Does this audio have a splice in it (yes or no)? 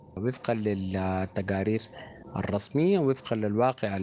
no